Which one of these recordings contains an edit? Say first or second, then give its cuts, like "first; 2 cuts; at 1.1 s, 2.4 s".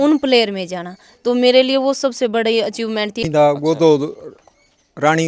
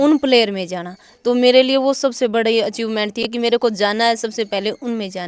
first; 1 cut; at 3.3 s